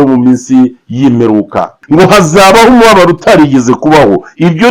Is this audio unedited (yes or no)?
no